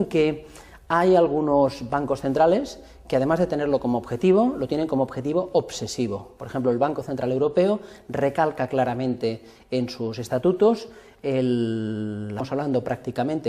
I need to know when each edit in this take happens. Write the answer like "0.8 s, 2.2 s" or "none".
none